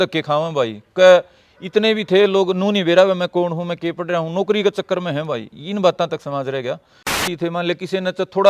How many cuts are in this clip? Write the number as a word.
one